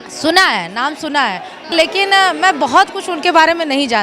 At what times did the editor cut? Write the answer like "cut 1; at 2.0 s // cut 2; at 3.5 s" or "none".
cut 1; at 1.7 s